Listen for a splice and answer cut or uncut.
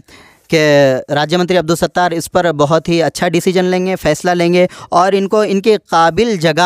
uncut